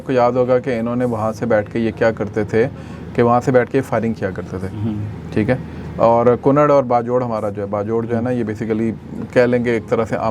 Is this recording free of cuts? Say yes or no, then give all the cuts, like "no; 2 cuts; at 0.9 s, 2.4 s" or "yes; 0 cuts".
yes; 0 cuts